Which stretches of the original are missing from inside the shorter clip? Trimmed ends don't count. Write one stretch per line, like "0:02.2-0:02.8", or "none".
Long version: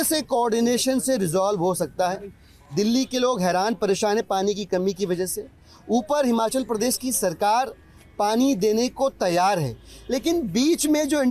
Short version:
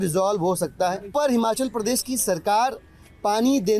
0:02.3-0:06.1